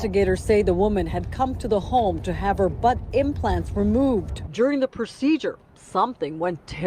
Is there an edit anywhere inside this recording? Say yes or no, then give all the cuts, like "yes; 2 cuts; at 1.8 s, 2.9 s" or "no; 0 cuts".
no; 0 cuts